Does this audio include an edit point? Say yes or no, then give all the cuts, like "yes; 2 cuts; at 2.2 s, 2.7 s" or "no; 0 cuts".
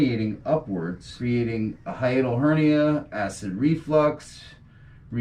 yes; 1 cut; at 1.1 s